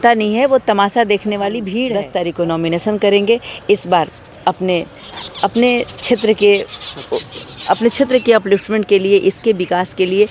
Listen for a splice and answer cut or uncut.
cut